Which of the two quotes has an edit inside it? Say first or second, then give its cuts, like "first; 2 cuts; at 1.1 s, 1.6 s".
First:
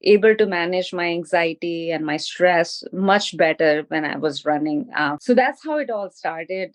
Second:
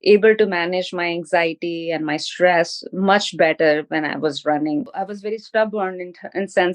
second; 1 cut; at 4.9 s